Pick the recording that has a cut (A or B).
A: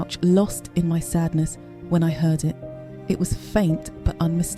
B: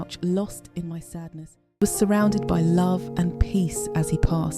B